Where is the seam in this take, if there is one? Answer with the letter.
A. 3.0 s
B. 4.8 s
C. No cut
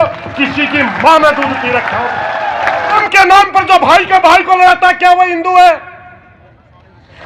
A